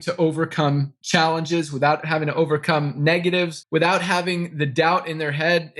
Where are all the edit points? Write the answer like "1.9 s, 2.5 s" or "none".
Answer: 2.0 s